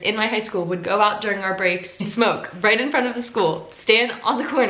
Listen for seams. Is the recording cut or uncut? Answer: cut